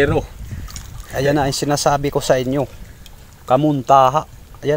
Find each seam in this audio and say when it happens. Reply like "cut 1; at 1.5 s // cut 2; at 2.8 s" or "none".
none